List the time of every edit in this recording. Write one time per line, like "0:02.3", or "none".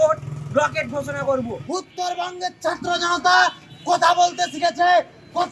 0:01.6